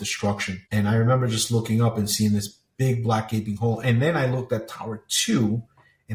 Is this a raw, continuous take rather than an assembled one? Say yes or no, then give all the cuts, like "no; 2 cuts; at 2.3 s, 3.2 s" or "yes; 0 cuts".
yes; 0 cuts